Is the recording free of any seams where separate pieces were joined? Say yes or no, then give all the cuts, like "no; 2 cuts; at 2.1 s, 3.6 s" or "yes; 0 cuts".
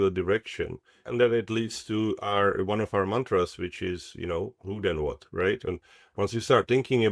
no; 2 cuts; at 0.9 s, 5.6 s